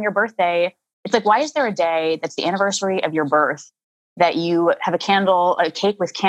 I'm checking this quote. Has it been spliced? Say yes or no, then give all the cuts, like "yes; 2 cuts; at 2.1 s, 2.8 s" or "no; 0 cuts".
no; 0 cuts